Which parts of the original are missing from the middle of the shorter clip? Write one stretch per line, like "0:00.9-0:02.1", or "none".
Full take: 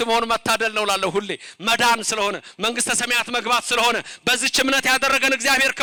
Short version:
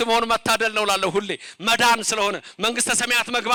none